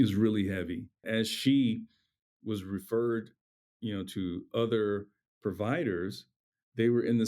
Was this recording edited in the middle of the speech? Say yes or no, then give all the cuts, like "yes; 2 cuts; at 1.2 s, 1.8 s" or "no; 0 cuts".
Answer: yes; 1 cut; at 1.0 s